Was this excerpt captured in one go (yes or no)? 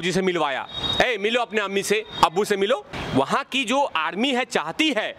no